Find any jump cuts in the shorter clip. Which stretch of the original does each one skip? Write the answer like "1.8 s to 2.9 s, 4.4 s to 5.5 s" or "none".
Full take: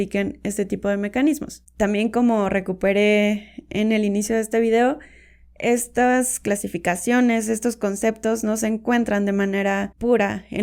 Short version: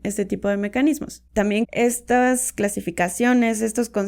1.6 s to 5.1 s